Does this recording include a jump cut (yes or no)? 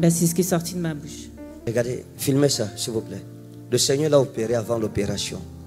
yes